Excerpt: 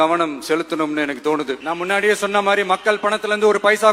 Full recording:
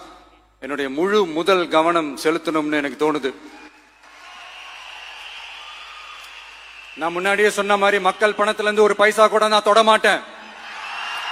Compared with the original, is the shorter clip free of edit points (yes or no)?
no